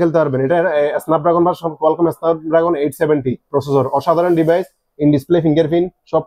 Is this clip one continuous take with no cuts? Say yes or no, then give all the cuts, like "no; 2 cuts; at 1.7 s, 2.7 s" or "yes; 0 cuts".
yes; 0 cuts